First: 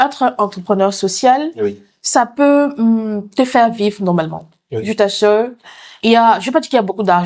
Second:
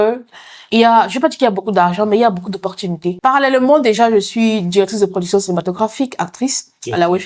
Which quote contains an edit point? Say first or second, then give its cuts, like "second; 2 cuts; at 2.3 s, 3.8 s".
second; 1 cut; at 3.1 s